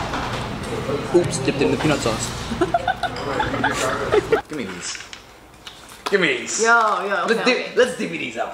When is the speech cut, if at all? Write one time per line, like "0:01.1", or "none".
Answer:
0:04.5